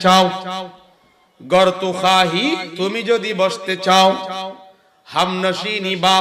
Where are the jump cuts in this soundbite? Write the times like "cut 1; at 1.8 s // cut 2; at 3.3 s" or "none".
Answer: cut 1; at 2.7 s